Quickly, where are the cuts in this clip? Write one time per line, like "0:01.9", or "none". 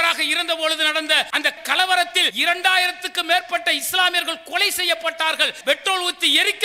0:02.3
0:05.6